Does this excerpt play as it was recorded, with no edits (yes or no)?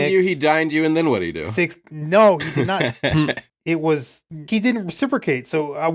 no